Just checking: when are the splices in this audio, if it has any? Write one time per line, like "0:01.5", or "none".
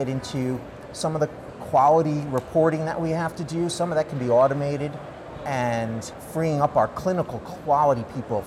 0:01.5
0:06.1